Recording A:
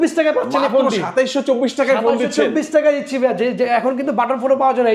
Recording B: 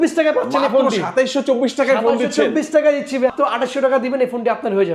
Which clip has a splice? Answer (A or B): B